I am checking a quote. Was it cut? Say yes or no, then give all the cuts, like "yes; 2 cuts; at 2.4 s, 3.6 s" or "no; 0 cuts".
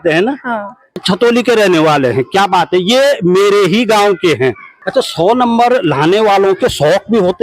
yes; 2 cuts; at 1.0 s, 4.7 s